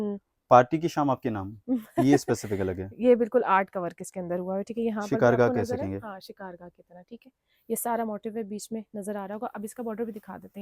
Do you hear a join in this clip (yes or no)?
no